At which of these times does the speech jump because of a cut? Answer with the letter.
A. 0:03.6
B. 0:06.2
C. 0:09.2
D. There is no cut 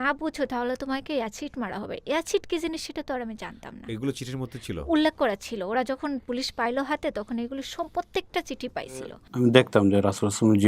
C